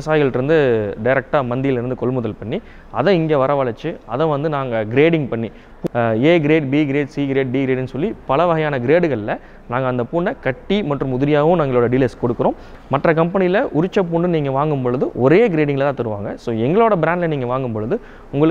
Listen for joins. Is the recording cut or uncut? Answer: cut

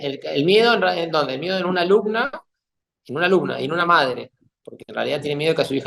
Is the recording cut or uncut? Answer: uncut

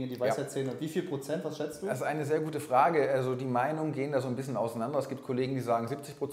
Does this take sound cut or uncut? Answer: uncut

